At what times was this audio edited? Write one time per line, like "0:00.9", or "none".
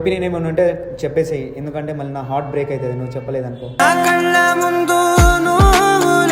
none